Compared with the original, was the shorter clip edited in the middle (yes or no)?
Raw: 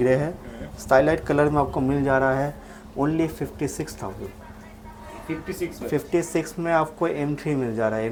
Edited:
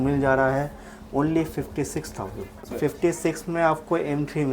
yes